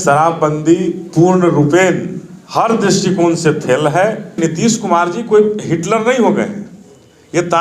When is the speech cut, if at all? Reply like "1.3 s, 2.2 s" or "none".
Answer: 4.3 s